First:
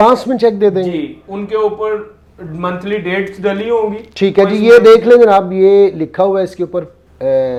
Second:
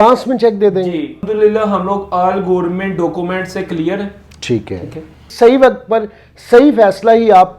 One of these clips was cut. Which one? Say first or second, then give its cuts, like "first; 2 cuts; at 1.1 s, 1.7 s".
second; 2 cuts; at 1.2 s, 5.2 s